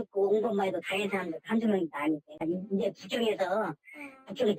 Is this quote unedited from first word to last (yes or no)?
yes